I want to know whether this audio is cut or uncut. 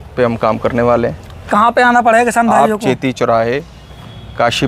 uncut